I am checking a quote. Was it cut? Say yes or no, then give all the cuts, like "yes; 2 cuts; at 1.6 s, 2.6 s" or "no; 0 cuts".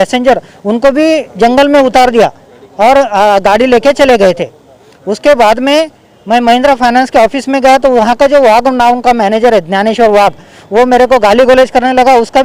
no; 0 cuts